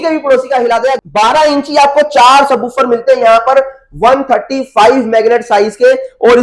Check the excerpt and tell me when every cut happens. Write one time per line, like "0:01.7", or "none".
0:01.0